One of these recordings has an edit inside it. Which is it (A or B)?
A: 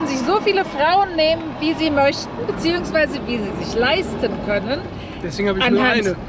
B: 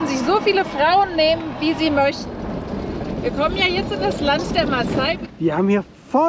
B